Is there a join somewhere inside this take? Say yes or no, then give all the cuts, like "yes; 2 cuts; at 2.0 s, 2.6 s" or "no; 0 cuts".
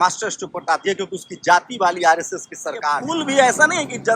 yes; 1 cut; at 3.0 s